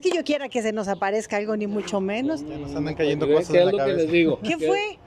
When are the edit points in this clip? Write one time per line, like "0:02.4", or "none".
none

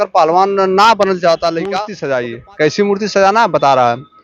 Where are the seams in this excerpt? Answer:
0:01.9

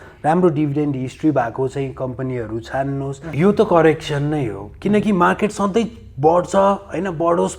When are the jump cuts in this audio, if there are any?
0:03.2

